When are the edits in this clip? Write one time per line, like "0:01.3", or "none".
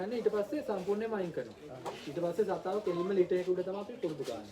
none